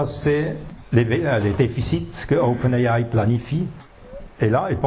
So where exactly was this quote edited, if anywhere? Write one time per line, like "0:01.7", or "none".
0:03.8